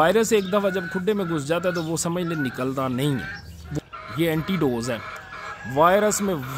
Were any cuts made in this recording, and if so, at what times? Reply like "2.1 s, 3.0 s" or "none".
3.6 s